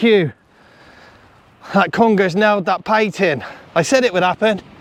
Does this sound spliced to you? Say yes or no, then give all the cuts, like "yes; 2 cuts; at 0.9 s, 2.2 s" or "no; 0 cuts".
no; 0 cuts